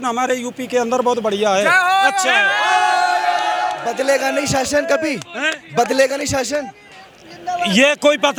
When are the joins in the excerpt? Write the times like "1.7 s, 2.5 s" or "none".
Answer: none

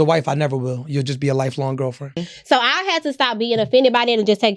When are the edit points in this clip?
2.3 s

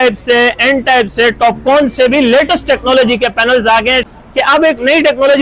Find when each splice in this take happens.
4.1 s

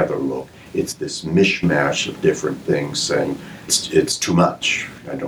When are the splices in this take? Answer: 3.8 s

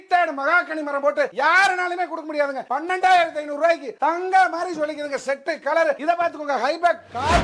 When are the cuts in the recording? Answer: 2.7 s, 6.0 s

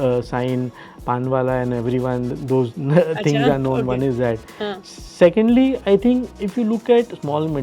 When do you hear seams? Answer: 6.4 s

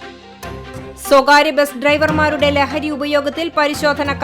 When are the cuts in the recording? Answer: 1.1 s

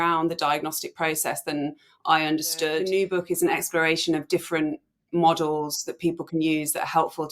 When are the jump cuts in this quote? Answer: 2.9 s

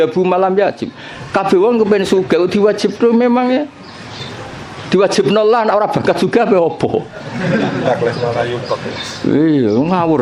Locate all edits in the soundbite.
none

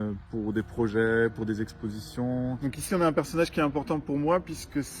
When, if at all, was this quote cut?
2.6 s

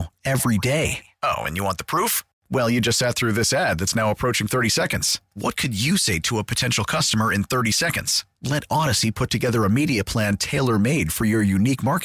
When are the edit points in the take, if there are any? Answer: none

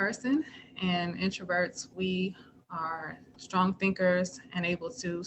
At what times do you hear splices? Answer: 3.3 s

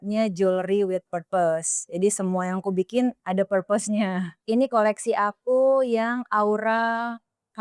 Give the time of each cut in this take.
3.2 s, 4.3 s

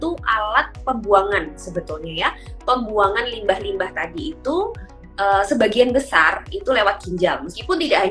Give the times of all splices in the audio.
none

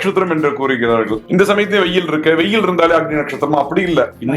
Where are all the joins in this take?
1.2 s

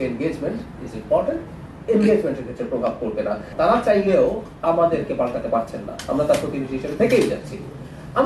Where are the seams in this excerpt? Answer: 3.5 s

